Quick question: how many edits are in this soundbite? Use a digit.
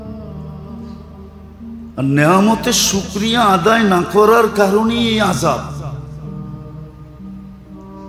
1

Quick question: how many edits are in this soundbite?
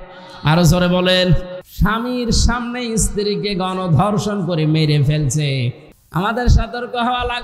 2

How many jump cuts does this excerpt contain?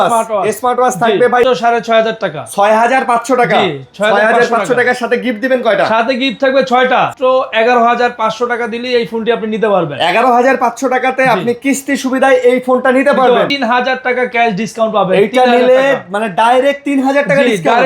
3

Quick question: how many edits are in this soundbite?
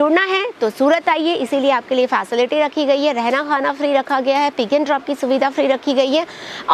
0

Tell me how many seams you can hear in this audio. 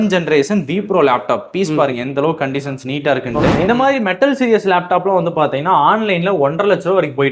1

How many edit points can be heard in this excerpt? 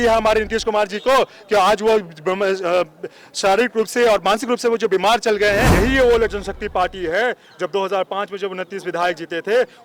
1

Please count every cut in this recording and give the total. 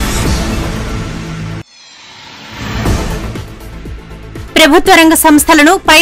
2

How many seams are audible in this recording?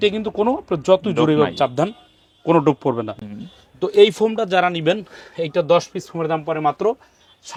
0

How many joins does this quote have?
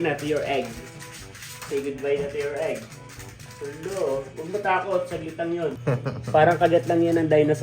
1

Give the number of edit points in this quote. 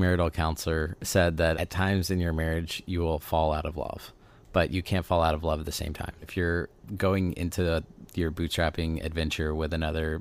3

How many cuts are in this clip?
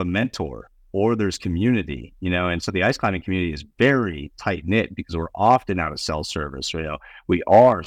0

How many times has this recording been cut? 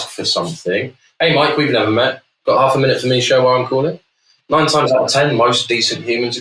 1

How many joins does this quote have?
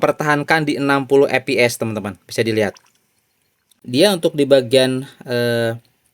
1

